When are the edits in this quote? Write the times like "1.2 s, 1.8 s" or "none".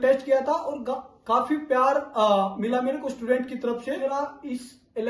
4.0 s